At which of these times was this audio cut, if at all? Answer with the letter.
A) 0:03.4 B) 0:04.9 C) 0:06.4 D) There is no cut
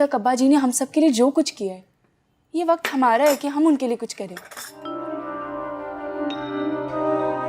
B